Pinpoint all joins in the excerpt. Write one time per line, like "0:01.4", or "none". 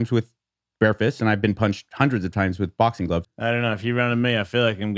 0:03.3